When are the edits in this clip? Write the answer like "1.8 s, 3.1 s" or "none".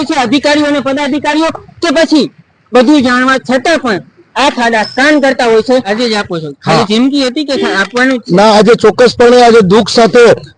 5.7 s